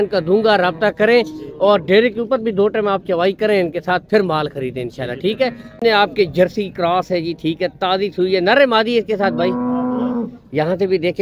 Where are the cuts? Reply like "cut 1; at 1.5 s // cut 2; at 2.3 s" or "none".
cut 1; at 5.8 s